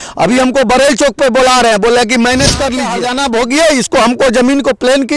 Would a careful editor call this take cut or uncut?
cut